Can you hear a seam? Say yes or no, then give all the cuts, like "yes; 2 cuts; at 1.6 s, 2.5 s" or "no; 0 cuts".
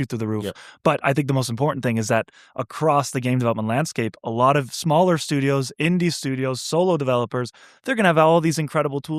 no; 0 cuts